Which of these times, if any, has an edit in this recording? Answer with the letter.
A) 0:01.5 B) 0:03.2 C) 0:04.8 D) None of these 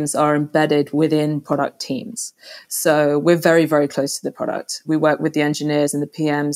C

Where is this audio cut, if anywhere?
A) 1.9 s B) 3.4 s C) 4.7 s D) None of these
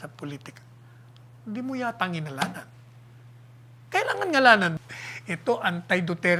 C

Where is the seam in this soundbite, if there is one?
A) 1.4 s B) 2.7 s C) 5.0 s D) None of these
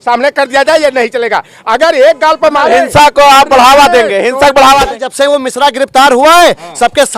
C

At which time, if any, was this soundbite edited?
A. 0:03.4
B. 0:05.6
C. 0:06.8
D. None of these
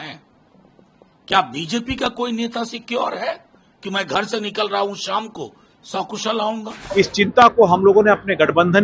C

